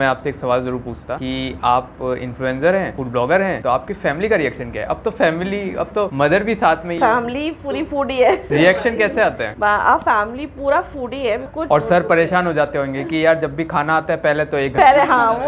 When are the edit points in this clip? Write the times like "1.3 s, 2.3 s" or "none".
11.5 s